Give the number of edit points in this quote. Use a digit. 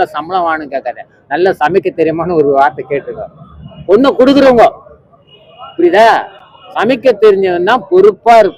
0